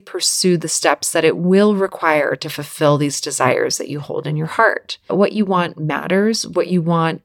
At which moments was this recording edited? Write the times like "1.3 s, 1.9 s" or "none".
5.1 s